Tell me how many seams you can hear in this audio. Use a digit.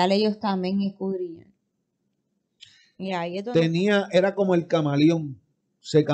1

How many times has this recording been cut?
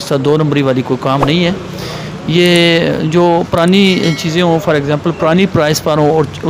0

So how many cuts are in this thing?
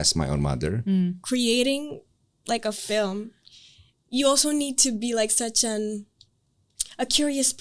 1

